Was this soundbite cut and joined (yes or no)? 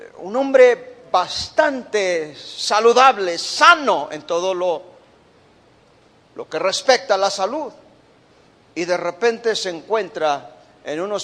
no